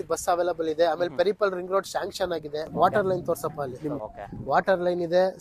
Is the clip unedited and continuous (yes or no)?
no